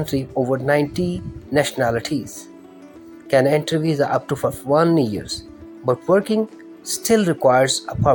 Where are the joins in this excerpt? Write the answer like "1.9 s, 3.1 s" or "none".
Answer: none